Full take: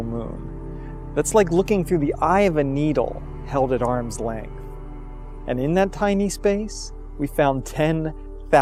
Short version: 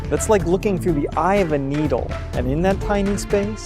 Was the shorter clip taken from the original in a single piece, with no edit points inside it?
no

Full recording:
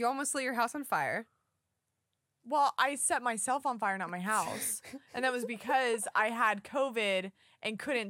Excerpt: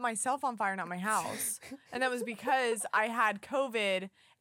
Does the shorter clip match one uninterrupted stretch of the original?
yes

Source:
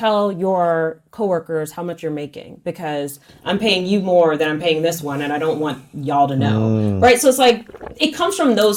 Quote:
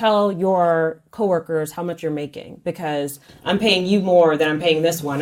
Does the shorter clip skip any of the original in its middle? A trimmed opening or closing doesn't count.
no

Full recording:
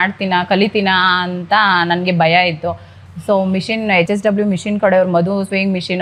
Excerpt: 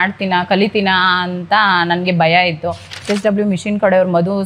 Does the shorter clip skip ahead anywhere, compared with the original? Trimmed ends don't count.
yes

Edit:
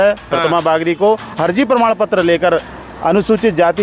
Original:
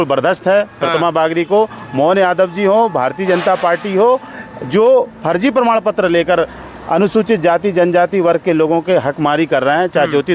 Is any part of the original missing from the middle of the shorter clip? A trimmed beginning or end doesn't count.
yes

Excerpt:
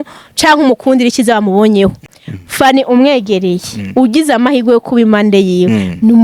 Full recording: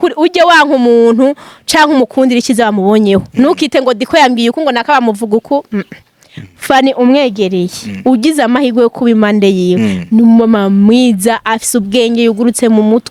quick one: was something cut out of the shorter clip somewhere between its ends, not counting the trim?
yes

